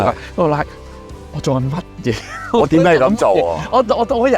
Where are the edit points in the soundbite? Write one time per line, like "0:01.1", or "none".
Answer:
none